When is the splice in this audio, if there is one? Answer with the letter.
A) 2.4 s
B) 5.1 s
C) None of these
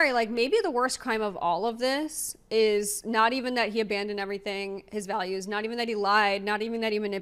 C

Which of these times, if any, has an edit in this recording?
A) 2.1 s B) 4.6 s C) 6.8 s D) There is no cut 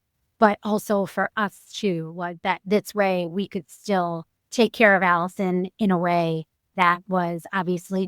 D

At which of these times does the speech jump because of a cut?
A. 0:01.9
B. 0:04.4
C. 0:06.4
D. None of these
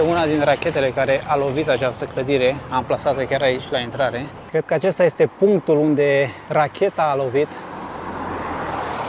B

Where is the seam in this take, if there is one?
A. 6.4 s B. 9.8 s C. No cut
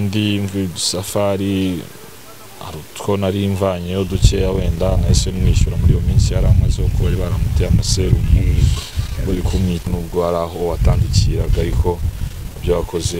B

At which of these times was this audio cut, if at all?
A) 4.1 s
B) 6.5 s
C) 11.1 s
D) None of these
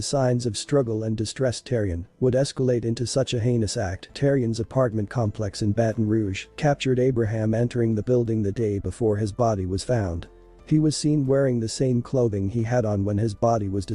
A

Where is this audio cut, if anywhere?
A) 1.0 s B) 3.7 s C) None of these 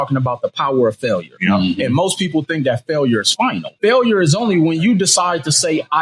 B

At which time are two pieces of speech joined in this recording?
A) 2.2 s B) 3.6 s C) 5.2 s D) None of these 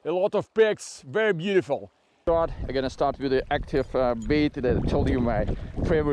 A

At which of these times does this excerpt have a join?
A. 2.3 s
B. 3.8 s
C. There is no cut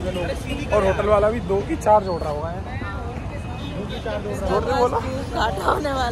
C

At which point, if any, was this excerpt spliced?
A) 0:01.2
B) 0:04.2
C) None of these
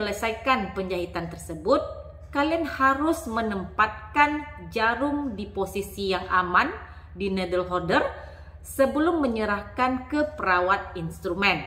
C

